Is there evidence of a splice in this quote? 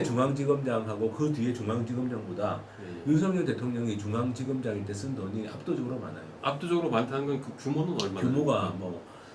no; 0 cuts

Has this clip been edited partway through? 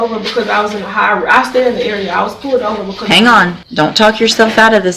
yes; 1 cut; at 3.6 s

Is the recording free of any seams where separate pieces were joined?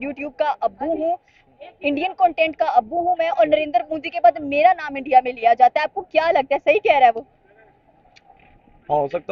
yes; 0 cuts

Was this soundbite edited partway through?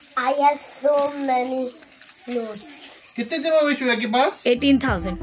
no; 0 cuts

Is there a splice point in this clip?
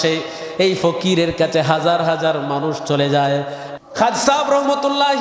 yes; 1 cut; at 3.6 s

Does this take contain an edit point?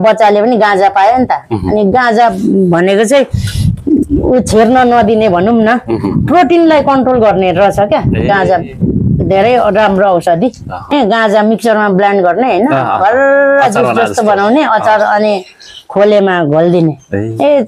yes; 1 cut; at 10.9 s

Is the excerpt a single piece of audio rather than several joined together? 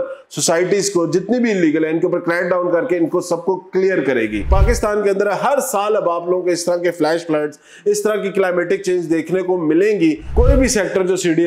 no; 2 cuts; at 4.5 s, 10.3 s

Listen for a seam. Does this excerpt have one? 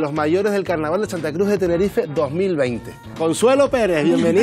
yes; 1 cut; at 3.1 s

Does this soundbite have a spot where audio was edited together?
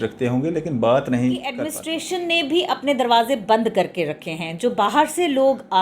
yes; 1 cut; at 1.7 s

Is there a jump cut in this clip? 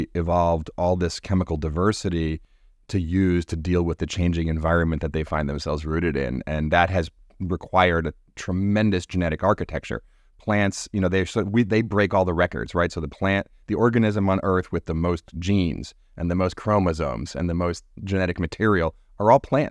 no; 0 cuts

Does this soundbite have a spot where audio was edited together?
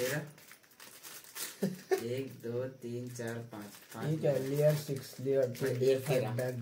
no; 0 cuts

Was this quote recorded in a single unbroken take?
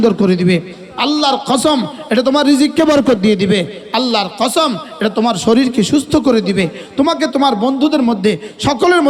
yes; 0 cuts

